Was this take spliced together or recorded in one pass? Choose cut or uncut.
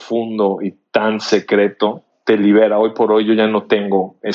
cut